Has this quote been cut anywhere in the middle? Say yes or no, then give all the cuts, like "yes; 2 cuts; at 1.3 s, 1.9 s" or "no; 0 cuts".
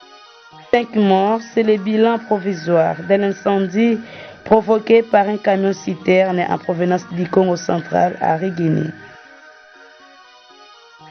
yes; 2 cuts; at 0.7 s, 9.0 s